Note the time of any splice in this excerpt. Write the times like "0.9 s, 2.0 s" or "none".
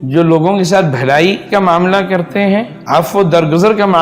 2.8 s